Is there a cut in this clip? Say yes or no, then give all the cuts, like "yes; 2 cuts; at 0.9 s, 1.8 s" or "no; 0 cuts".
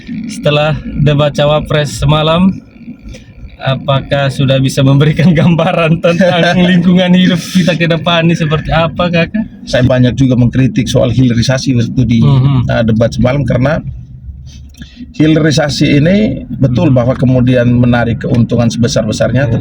yes; 1 cut; at 9.6 s